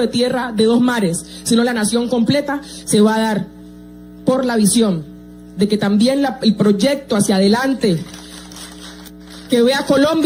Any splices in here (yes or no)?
no